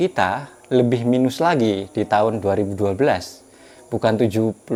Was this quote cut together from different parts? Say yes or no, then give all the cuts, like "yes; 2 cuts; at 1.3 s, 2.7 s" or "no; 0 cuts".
no; 0 cuts